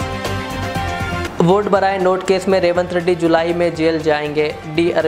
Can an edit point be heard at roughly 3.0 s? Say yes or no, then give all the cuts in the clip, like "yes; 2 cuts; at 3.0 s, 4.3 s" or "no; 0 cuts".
no; 1 cut; at 1.3 s